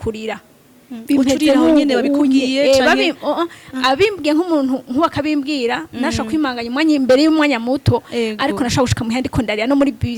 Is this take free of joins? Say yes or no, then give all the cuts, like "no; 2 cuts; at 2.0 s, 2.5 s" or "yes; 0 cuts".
yes; 0 cuts